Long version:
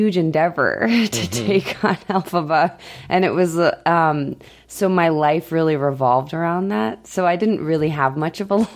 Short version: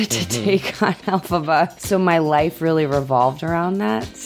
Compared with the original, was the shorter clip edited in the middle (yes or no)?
yes